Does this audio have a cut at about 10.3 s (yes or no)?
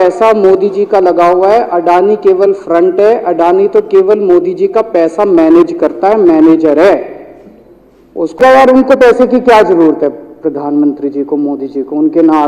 no